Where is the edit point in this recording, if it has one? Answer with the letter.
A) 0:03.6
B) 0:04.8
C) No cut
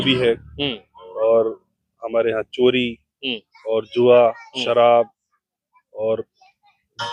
C